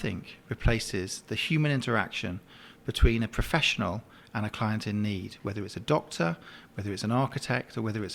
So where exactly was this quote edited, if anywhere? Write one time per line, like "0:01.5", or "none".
none